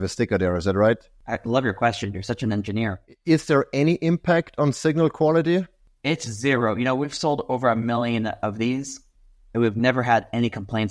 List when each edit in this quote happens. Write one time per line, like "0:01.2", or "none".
0:01.1
0:03.1
0:05.8